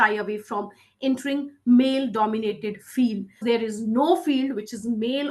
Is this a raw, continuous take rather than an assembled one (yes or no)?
no